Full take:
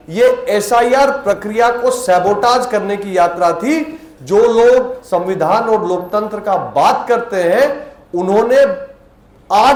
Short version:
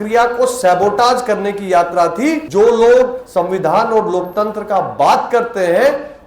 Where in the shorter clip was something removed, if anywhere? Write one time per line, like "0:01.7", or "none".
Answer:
0:02.4